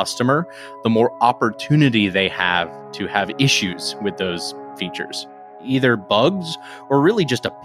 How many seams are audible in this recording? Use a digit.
1